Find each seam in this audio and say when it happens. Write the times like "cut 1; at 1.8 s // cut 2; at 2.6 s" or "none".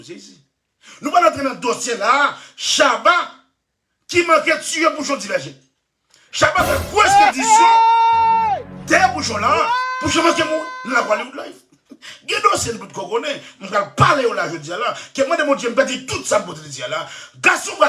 cut 1; at 7.1 s // cut 2; at 8.6 s